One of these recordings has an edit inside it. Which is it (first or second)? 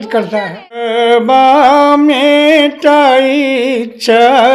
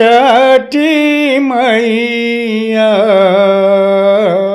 first